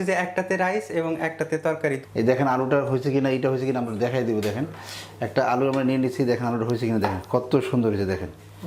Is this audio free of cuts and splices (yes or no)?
no